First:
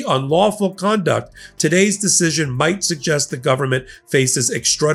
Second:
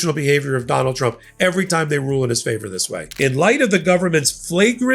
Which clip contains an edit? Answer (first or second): second